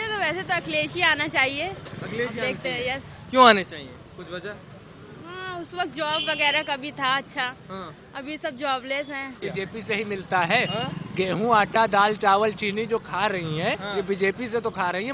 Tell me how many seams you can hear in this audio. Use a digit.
1